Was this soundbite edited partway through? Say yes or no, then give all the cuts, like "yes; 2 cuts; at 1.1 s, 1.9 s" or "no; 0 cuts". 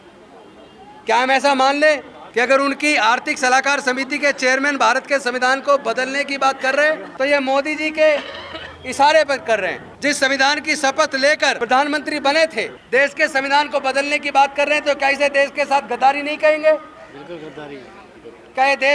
yes; 5 cuts; at 2.2 s, 7.1 s, 9.9 s, 11.6 s, 12.8 s